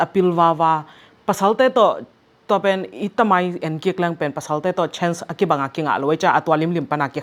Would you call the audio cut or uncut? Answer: uncut